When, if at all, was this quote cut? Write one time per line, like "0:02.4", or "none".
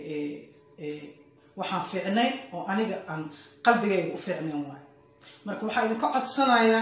none